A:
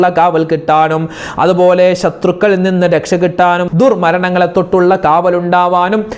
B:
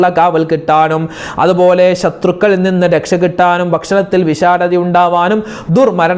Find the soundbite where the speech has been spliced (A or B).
A